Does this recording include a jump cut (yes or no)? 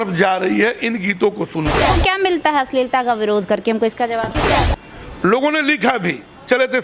yes